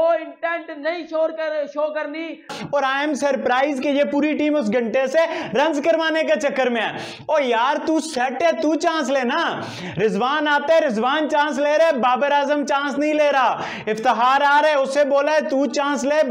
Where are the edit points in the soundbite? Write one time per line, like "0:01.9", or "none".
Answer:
0:02.5